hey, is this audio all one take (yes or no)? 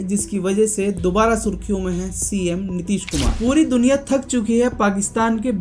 no